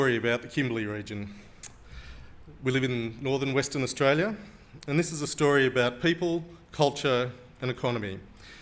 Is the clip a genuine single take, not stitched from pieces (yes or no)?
yes